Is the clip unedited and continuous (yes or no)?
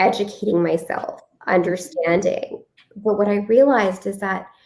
yes